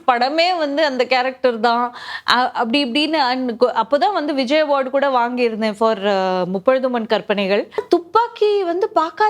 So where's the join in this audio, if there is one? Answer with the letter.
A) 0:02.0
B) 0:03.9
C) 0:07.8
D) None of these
C